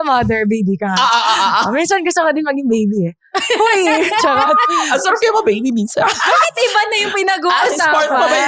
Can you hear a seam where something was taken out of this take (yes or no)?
no